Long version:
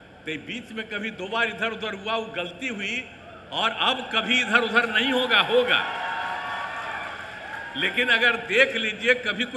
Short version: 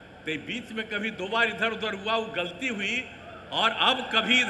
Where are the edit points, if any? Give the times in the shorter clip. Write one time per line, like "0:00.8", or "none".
none